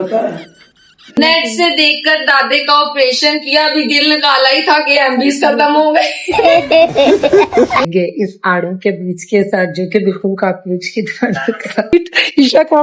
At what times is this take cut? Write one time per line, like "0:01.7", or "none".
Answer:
0:01.0
0:07.8
0:11.9

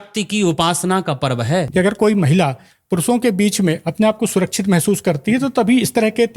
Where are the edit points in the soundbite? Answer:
0:01.7

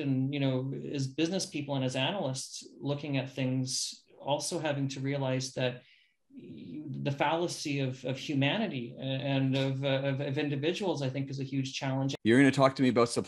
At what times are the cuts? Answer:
0:12.1

